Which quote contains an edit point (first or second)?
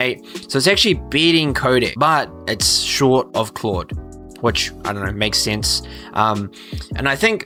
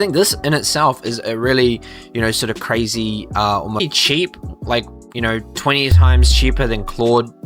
second